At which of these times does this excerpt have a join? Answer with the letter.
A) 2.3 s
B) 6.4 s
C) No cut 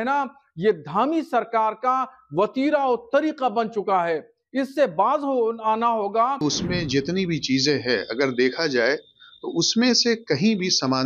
B